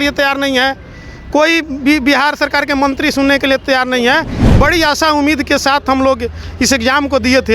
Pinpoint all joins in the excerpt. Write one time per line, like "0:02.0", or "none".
0:04.4